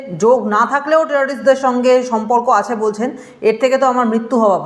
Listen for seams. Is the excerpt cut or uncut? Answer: uncut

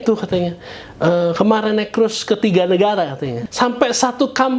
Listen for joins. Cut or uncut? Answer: cut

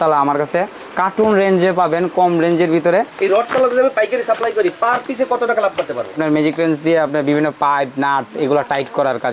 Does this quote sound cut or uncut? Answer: cut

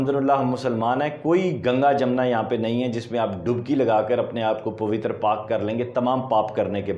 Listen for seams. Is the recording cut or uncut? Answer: uncut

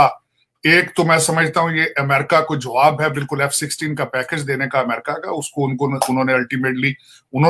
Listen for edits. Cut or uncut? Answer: uncut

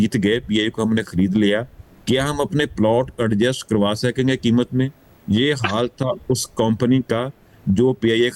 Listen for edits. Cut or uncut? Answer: uncut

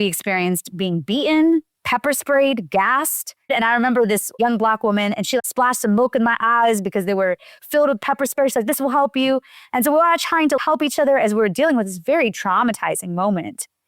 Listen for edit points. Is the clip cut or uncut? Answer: cut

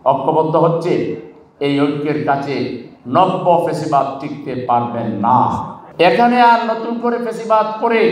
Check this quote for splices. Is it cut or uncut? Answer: cut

